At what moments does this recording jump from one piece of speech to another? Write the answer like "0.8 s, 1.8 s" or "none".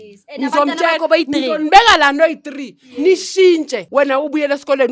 3.8 s